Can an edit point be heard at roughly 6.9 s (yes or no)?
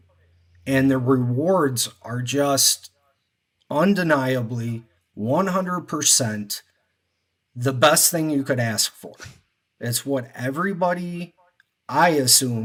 no